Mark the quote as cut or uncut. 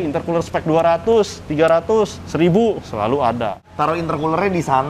cut